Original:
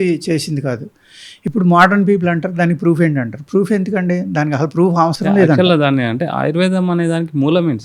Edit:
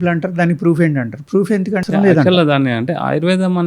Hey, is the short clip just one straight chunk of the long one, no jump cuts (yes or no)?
no